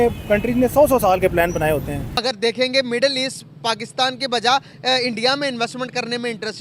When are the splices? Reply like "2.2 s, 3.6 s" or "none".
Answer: 2.1 s